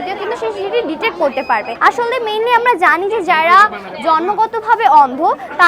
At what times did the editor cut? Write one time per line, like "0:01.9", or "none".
0:01.7